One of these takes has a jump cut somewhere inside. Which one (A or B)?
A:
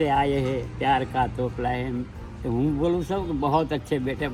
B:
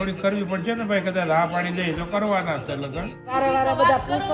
B